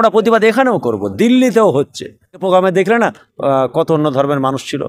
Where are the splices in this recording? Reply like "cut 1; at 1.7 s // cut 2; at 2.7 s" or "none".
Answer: cut 1; at 2.4 s

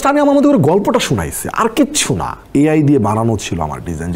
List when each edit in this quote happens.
cut 1; at 2.3 s

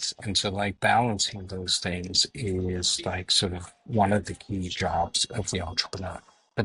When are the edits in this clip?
none

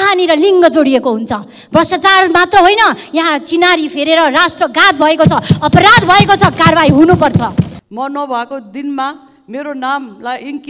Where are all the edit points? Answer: cut 1; at 7.7 s

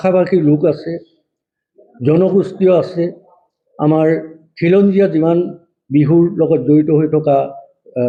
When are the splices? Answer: none

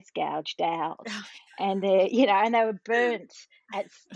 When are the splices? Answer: none

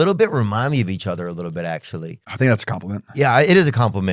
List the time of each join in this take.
cut 1; at 2.2 s

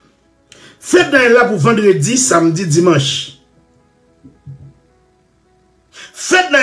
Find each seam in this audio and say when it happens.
none

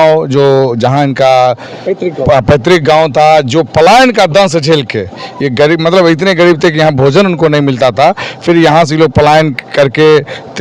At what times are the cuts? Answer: none

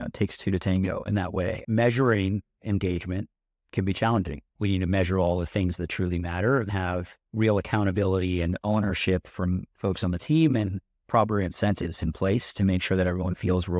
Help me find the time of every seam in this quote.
cut 1; at 1.6 s // cut 2; at 4.5 s // cut 3; at 6.7 s

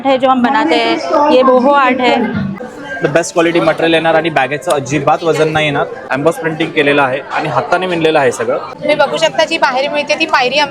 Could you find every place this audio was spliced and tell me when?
cut 1; at 2.5 s // cut 2; at 6.0 s // cut 3; at 8.7 s

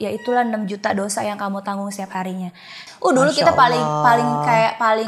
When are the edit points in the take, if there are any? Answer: cut 1; at 2.8 s

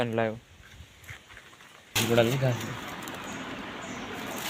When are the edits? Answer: cut 1; at 1.9 s

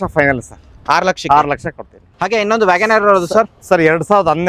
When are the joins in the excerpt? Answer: cut 1; at 1.9 s

